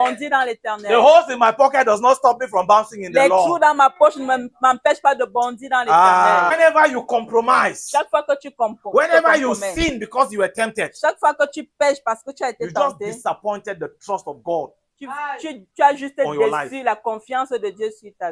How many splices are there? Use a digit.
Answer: 1